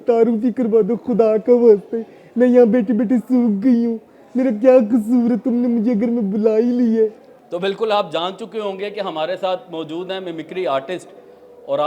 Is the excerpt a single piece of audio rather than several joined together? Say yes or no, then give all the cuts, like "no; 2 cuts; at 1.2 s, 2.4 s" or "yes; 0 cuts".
yes; 0 cuts